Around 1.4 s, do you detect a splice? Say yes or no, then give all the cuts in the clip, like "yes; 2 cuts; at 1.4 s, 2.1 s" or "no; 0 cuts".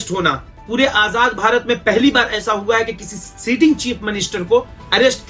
no; 0 cuts